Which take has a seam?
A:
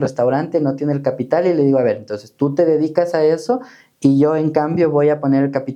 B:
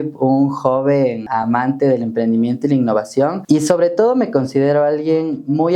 B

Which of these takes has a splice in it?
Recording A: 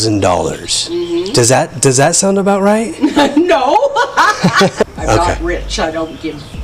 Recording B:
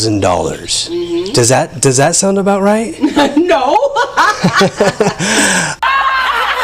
A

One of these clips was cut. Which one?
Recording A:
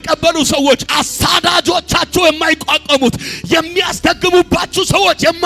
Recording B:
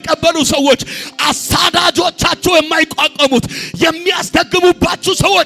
A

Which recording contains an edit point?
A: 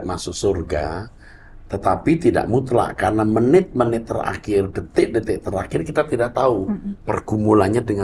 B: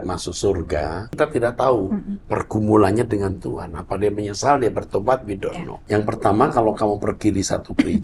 B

